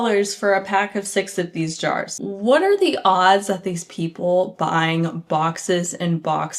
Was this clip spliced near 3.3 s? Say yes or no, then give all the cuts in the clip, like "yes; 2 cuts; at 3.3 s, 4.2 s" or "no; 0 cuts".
no; 1 cut; at 2.1 s